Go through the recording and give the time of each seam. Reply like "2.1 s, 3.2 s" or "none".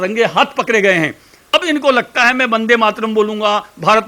1.5 s